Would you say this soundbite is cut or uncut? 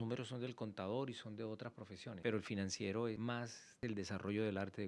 cut